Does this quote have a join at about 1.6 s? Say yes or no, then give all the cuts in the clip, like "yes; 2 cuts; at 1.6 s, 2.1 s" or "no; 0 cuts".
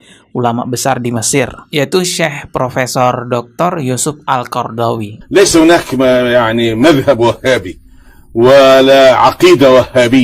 no; 1 cut; at 5.2 s